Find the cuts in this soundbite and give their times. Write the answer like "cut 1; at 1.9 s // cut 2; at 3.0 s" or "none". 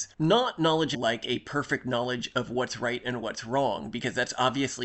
cut 1; at 1.0 s